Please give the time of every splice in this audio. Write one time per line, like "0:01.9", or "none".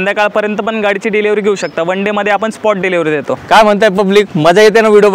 0:03.4